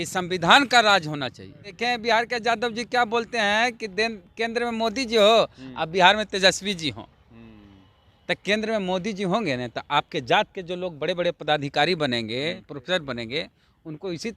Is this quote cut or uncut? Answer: cut